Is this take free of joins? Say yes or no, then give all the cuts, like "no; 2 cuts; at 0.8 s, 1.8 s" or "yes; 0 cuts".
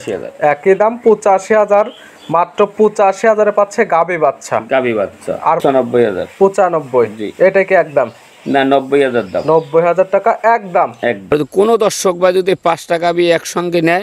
no; 2 cuts; at 5.6 s, 11.3 s